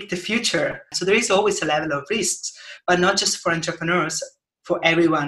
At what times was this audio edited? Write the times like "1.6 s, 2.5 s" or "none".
0.9 s